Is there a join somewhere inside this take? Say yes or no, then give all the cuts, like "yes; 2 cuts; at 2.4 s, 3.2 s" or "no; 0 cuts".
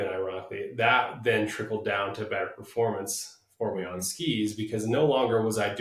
no; 0 cuts